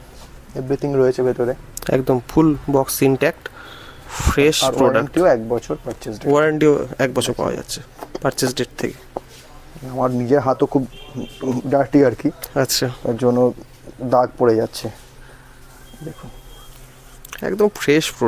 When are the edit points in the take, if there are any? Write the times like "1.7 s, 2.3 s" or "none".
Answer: none